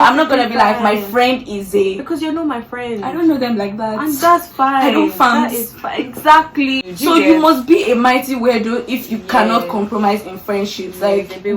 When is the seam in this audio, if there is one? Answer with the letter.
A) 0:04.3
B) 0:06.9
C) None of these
B